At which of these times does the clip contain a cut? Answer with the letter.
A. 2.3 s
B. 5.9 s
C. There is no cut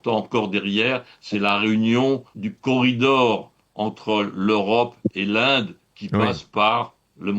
A